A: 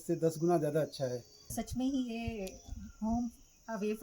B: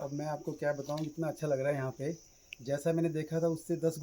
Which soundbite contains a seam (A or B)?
A